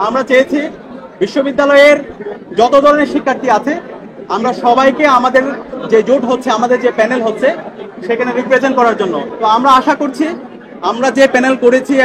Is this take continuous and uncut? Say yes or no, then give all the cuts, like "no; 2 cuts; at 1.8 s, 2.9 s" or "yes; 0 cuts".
no; 1 cut; at 9.3 s